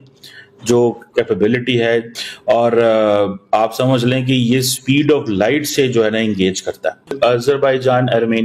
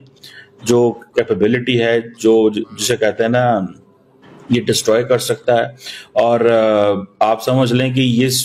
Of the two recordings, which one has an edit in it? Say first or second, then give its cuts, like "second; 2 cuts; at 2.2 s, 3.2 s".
first; 2 cuts; at 2.1 s, 7.1 s